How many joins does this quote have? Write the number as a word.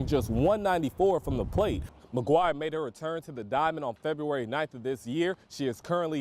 one